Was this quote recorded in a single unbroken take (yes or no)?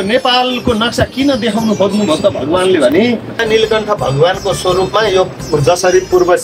no